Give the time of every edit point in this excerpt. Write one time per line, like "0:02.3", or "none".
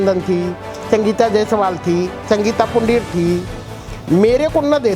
none